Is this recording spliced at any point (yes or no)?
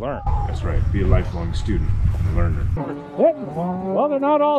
yes